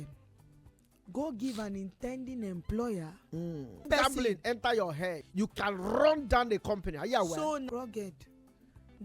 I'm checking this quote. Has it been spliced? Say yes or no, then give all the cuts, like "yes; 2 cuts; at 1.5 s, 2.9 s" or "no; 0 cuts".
yes; 3 cuts; at 3.8 s, 5.2 s, 7.6 s